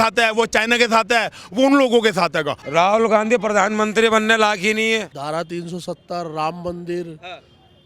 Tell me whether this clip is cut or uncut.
cut